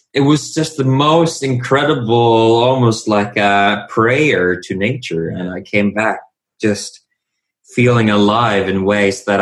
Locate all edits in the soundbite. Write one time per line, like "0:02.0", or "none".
none